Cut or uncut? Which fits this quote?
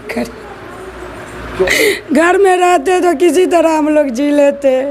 cut